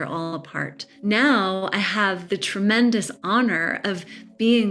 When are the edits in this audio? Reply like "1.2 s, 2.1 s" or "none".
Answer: 0.9 s, 2.2 s